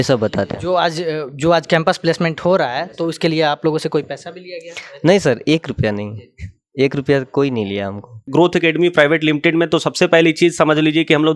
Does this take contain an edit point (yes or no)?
yes